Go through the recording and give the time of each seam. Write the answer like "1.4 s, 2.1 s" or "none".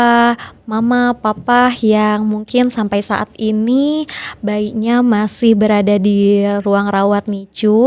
none

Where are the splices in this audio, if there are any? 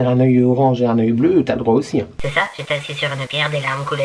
2.1 s

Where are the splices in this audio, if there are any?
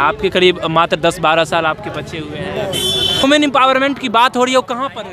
3.2 s

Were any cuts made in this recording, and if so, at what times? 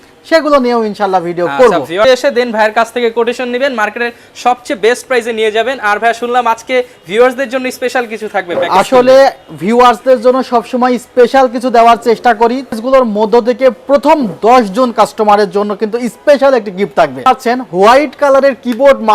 2.0 s, 12.8 s, 17.3 s

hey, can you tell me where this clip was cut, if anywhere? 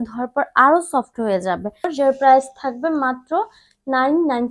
1.9 s

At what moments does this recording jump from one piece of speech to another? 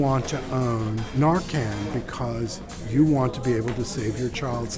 1.0 s

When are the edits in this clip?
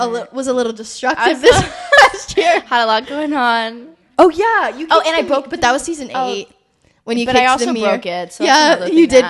none

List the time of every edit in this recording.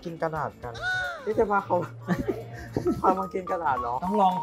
none

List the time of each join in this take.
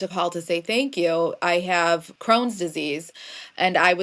2.1 s

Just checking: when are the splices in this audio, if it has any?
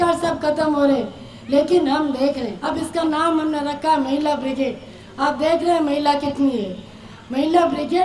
2.5 s

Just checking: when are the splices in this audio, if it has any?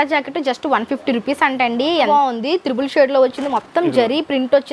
2.1 s

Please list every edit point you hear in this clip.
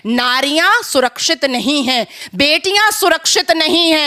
none

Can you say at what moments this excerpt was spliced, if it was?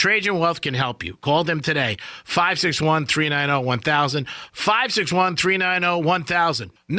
none

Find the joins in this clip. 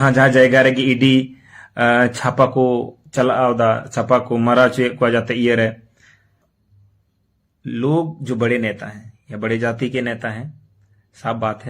6.4 s

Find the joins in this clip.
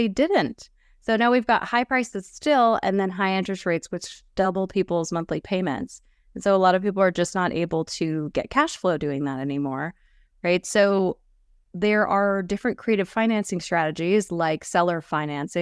none

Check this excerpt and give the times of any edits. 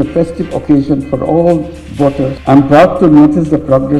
2.4 s

